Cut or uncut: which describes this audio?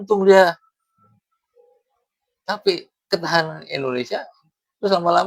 uncut